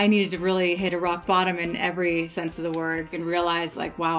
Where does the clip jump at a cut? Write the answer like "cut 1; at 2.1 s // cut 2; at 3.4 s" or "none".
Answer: cut 1; at 3.1 s